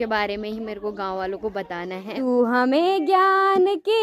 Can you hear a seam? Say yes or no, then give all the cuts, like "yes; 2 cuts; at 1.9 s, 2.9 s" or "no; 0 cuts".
yes; 1 cut; at 2.1 s